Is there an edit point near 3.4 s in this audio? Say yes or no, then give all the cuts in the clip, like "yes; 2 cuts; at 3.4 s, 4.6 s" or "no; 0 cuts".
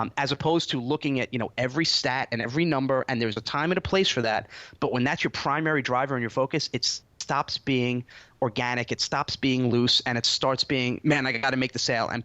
yes; 2 cuts; at 3.4 s, 10.3 s